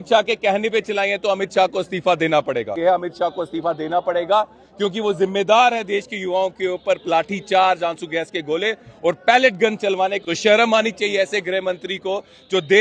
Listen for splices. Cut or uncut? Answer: cut